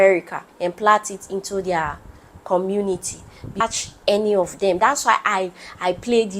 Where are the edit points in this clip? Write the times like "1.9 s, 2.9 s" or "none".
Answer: 3.5 s